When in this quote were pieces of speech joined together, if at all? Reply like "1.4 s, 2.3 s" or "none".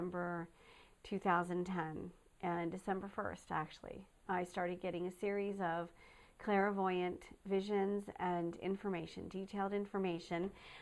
4.2 s